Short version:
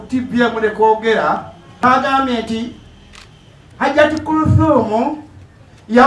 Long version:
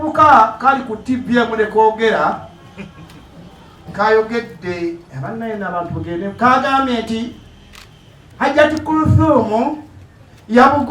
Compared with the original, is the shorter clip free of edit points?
no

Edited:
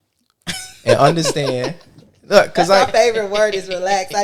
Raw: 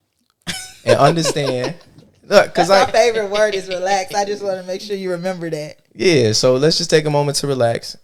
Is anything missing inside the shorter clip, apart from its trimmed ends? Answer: no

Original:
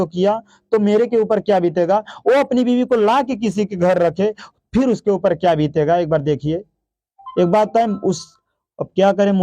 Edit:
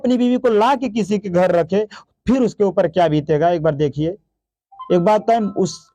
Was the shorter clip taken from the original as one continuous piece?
yes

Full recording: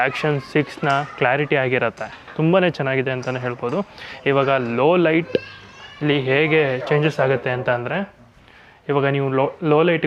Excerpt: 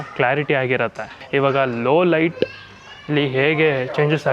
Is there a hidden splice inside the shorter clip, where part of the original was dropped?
yes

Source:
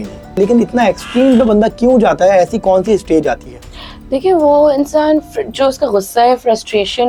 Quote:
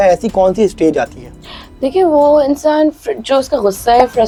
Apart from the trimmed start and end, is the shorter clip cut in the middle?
no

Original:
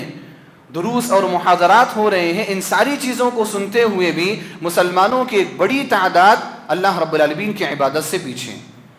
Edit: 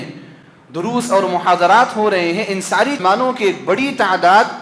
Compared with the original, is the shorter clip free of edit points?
no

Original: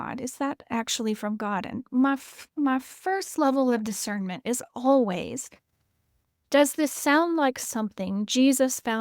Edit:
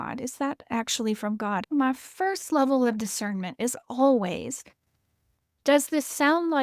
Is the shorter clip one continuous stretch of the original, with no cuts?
no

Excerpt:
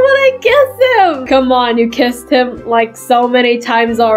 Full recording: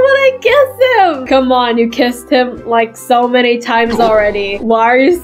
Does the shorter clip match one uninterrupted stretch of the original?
yes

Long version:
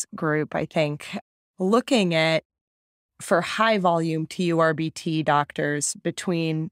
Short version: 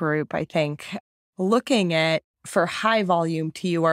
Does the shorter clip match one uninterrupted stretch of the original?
no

